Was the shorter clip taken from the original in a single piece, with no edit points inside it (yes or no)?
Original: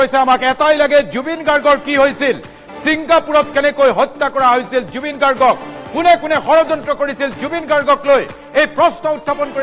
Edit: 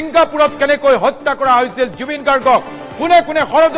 yes